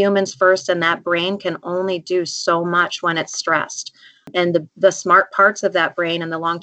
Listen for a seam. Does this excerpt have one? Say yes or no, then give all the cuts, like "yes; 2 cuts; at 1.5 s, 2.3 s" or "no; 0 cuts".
yes; 1 cut; at 4.3 s